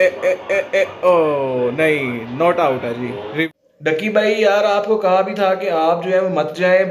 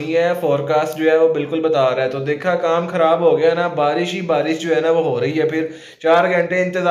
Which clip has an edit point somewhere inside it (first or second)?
first